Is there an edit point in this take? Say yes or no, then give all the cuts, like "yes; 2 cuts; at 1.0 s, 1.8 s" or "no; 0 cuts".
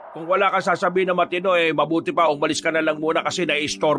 no; 0 cuts